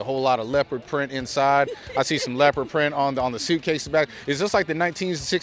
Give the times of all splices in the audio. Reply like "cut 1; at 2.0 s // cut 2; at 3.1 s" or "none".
none